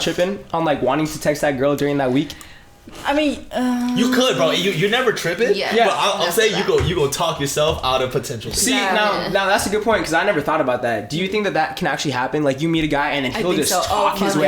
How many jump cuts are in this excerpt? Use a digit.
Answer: 0